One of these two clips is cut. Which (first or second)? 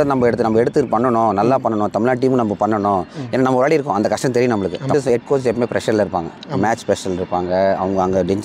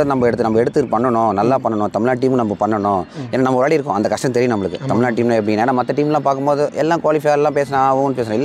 first